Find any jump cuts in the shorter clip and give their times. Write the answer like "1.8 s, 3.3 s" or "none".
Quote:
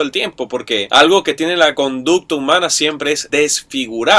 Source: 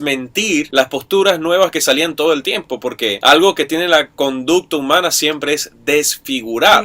1.7 s, 3.2 s